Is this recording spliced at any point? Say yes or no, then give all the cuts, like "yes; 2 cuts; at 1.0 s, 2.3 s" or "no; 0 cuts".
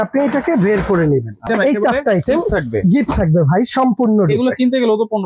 yes; 1 cut; at 1.5 s